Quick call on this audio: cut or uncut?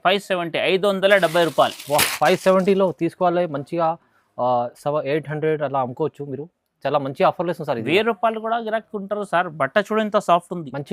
uncut